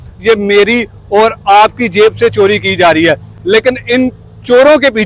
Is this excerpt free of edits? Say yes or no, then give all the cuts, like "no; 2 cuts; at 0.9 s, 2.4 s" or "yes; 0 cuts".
yes; 0 cuts